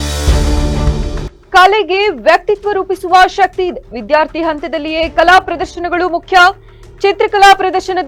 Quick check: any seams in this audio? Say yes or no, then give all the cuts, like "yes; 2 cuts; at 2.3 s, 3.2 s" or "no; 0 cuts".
no; 0 cuts